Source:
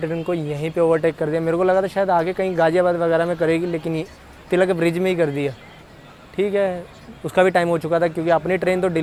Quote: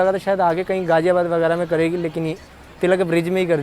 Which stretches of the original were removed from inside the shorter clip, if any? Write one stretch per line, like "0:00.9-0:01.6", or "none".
none